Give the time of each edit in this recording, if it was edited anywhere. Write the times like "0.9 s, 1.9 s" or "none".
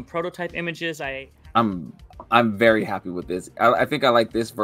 1.1 s